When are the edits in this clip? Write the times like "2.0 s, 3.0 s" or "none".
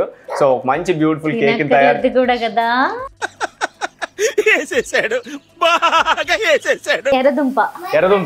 7.1 s

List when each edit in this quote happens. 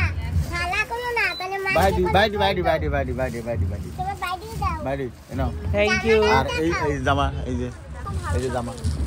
8.0 s

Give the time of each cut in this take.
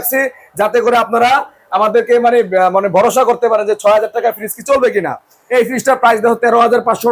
5.3 s

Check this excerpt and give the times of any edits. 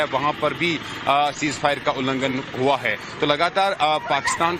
3.3 s

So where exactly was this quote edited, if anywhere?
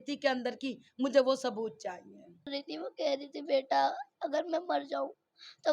2.5 s

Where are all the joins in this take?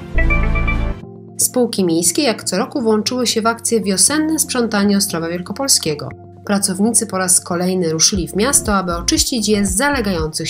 1.3 s

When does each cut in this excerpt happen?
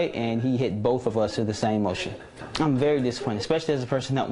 2.4 s

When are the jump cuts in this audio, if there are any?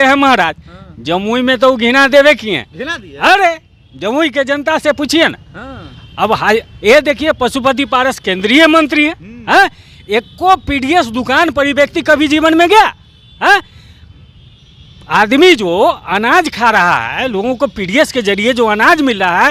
none

